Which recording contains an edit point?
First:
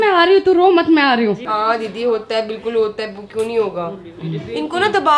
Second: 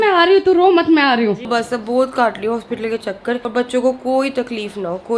second; 2 cuts; at 1.4 s, 3.4 s

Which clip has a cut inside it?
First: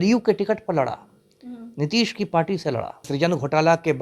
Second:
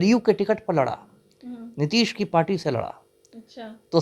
first; 1 cut; at 3.0 s

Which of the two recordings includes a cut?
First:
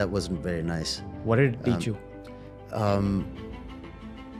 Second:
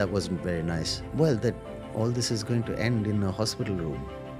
second; 1 cut; at 1.0 s

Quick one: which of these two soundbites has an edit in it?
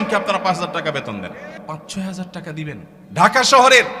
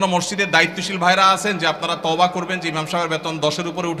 first; 2 cuts; at 1.6 s, 2.9 s

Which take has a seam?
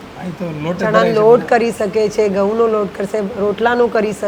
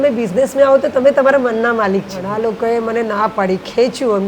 second; 1 cut; at 2.2 s

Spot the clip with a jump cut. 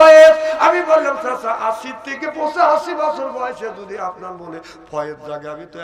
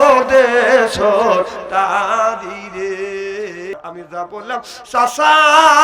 second; 1 cut; at 3.7 s

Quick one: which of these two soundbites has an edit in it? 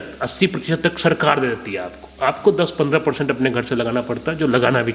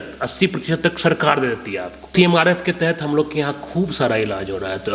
second; 1 cut; at 2.1 s

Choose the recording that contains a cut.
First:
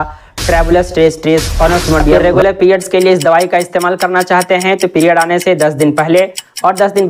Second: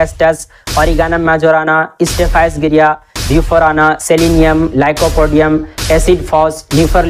first; 1 cut; at 2.2 s

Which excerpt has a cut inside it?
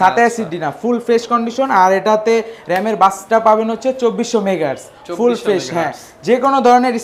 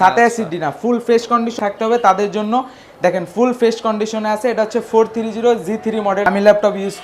second; 2 cuts; at 1.5 s, 6.3 s

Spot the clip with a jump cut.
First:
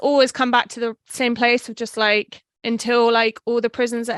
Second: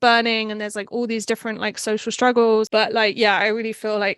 second; 1 cut; at 2.7 s

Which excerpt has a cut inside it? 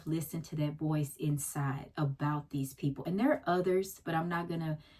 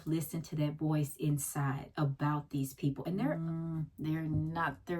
second; 1 cut; at 3.3 s

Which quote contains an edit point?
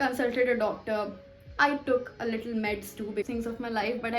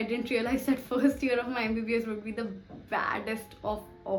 first; 1 cut; at 3.3 s

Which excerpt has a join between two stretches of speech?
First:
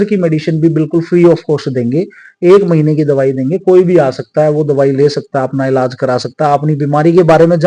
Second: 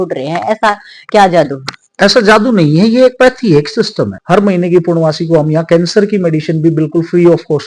second; 1 cut; at 4.2 s

